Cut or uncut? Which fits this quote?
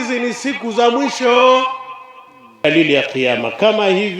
cut